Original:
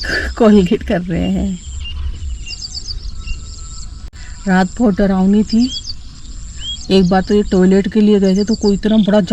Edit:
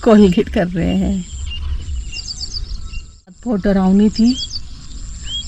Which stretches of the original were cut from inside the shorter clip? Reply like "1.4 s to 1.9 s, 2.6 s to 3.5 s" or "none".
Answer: 3.7 s to 4.7 s